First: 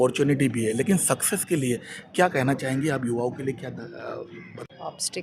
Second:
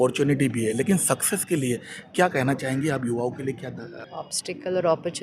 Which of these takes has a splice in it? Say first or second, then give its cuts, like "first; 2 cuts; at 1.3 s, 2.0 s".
second; 1 cut; at 3.9 s